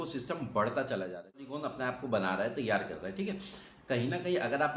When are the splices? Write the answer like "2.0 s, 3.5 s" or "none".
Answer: 1.5 s